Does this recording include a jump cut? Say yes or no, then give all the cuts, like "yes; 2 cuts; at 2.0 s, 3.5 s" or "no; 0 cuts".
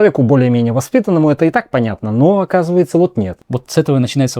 yes; 1 cut; at 3.4 s